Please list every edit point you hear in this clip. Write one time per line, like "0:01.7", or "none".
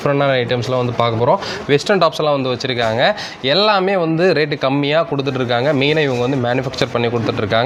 none